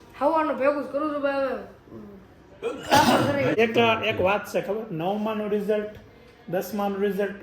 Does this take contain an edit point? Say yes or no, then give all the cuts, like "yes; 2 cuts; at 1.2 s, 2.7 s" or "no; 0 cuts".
yes; 1 cut; at 3.6 s